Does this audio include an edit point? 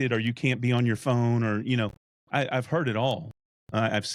no; 0 cuts

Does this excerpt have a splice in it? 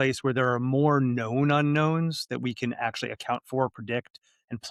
no; 0 cuts

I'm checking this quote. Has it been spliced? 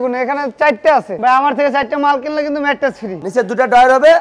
yes; 2 cuts; at 1.1 s, 3.2 s

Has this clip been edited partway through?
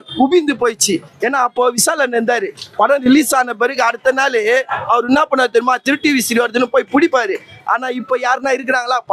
no; 0 cuts

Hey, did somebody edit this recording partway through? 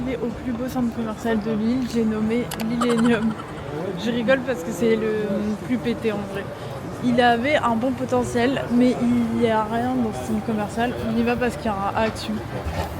no; 0 cuts

